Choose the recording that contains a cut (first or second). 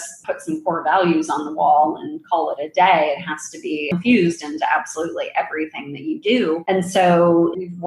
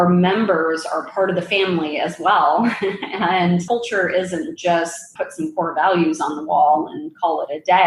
first